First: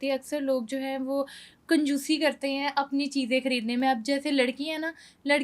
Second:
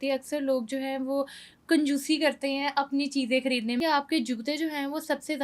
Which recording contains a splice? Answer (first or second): second